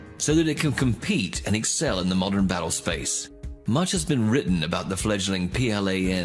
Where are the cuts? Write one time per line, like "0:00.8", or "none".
0:04.4